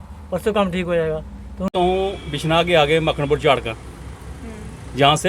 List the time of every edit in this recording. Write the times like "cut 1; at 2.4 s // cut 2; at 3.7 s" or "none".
cut 1; at 1.7 s

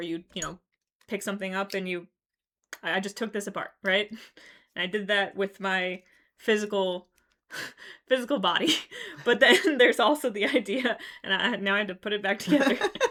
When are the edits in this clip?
none

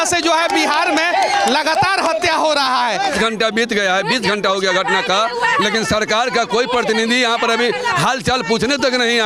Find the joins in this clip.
cut 1; at 3.1 s

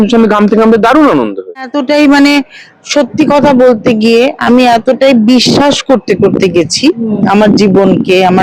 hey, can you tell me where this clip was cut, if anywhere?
cut 1; at 1.8 s

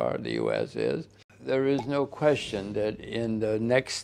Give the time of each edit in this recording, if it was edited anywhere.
cut 1; at 1.3 s

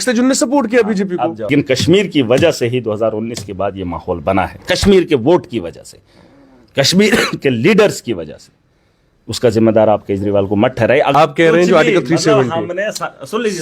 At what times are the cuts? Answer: cut 1; at 1.5 s // cut 2; at 11.1 s

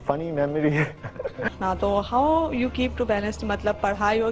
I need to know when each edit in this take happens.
cut 1; at 1.4 s

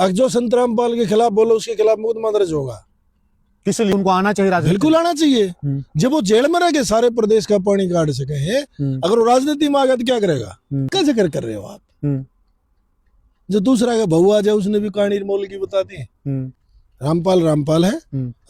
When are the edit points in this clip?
cut 1; at 3.9 s // cut 2; at 10.9 s // cut 3; at 16.5 s

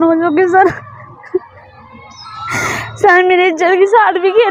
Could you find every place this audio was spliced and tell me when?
none

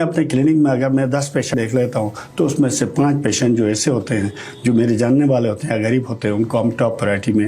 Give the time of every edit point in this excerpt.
cut 1; at 1.5 s

